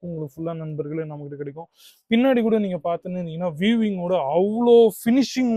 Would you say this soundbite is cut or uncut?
uncut